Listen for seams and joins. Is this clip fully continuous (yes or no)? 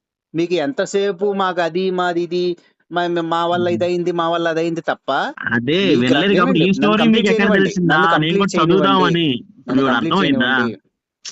yes